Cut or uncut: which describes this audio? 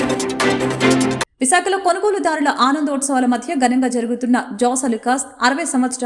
cut